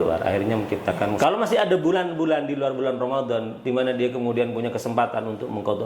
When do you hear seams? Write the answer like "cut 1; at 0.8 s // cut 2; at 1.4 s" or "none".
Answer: cut 1; at 1.2 s